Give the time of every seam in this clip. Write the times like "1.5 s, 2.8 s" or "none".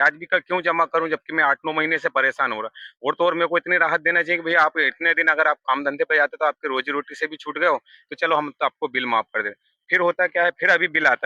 none